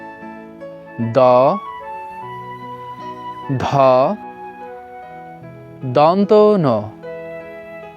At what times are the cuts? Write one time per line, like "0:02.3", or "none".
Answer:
0:00.9
0:01.9
0:03.5
0:04.2
0:05.8